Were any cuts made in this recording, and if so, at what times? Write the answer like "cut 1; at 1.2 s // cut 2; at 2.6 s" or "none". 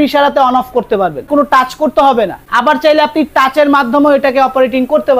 cut 1; at 1.3 s // cut 2; at 2.4 s